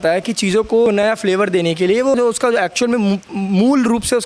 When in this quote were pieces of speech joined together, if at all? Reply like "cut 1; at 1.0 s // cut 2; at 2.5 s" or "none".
cut 1; at 0.9 s // cut 2; at 2.1 s